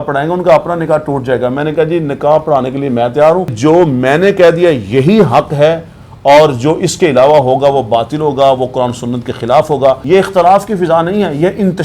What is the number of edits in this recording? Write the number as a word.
two